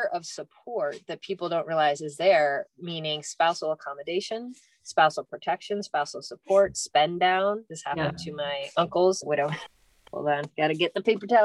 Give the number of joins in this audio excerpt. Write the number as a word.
one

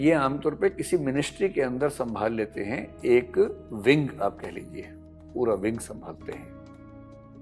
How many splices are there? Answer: one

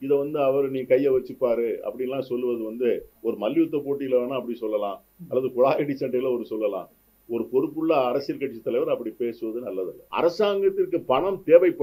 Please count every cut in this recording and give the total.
one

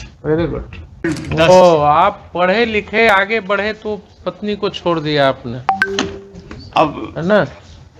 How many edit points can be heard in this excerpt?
one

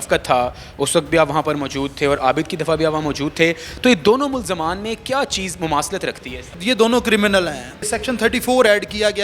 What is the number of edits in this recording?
two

